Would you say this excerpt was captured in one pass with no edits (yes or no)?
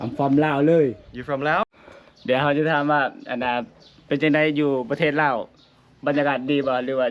no